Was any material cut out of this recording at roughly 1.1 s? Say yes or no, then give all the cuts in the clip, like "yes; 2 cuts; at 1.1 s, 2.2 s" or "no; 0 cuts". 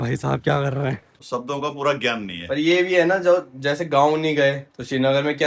yes; 1 cut; at 1.1 s